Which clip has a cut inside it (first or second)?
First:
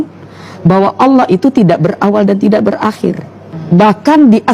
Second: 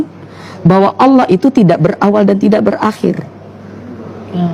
first